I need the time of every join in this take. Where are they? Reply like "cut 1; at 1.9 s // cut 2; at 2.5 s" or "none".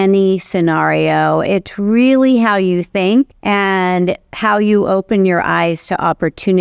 cut 1; at 3.4 s